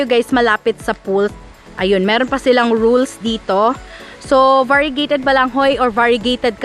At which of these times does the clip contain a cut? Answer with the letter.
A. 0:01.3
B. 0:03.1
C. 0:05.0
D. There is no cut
A